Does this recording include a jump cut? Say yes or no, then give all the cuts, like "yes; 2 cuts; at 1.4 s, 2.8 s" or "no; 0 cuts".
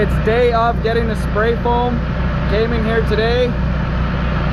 no; 0 cuts